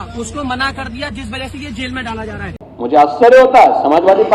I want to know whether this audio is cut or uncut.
cut